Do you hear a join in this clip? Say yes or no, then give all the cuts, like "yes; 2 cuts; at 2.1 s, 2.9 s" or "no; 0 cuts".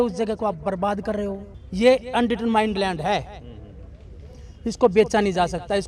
yes; 1 cut; at 1.5 s